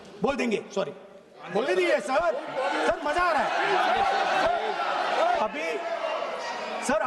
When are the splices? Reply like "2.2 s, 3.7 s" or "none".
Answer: 1.4 s, 5.4 s